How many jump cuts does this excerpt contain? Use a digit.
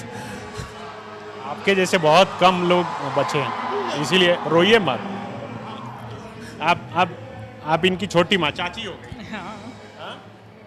0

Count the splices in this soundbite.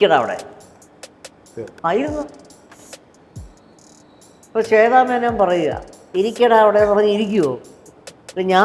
0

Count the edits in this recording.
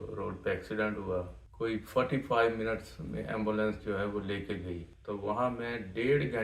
2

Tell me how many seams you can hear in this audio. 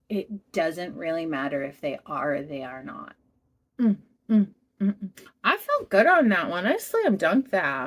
1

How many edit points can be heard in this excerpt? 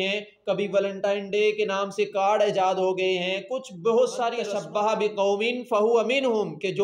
1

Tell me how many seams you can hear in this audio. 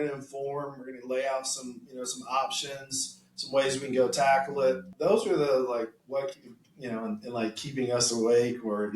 2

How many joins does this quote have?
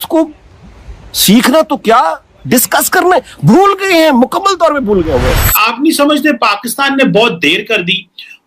1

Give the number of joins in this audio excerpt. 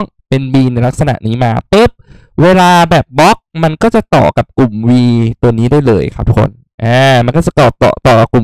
0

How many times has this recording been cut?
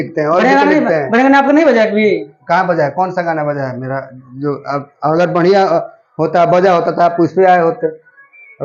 0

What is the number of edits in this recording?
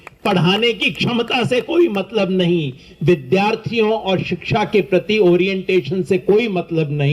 0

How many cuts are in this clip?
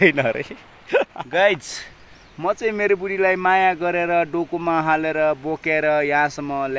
1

